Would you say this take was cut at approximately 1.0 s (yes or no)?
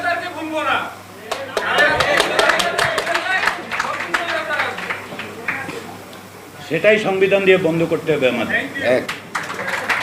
no